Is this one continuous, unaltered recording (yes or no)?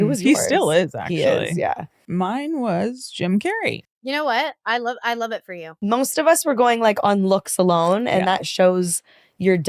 no